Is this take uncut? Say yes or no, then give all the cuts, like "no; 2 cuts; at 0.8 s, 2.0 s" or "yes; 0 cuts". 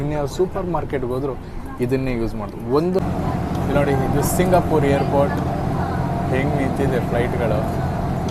no; 1 cut; at 3.0 s